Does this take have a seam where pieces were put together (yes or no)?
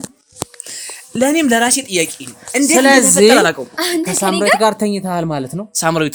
no